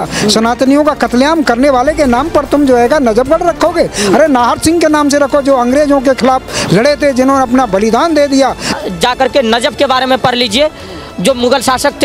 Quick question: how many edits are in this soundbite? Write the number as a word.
one